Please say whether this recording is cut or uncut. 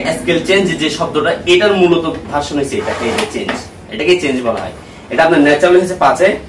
uncut